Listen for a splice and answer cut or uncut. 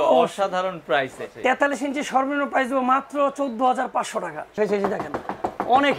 cut